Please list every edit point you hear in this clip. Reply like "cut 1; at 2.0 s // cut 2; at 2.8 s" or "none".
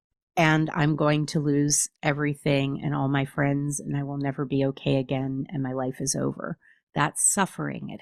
none